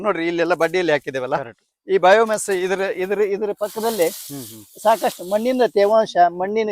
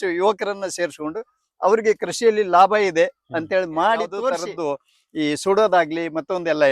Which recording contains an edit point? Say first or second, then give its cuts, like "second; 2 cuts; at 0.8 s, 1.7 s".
second; 1 cut; at 4.4 s